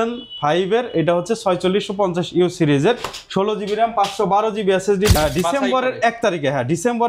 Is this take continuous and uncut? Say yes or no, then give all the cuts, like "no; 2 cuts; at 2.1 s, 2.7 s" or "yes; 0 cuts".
no; 1 cut; at 5.2 s